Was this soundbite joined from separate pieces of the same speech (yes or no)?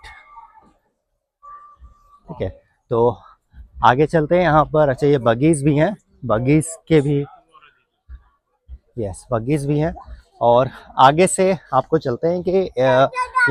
no